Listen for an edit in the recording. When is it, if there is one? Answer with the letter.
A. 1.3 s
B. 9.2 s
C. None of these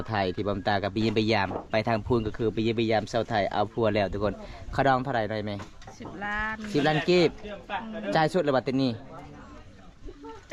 C